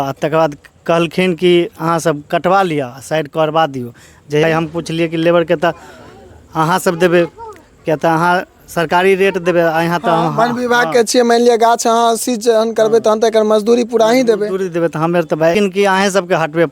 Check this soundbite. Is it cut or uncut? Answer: cut